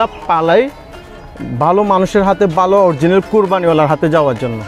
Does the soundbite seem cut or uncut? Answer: uncut